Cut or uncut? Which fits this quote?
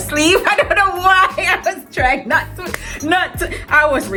uncut